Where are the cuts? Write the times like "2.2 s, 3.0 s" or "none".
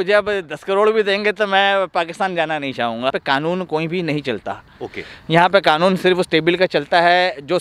3.2 s